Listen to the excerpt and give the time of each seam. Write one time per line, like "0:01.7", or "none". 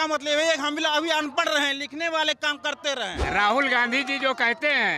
0:03.2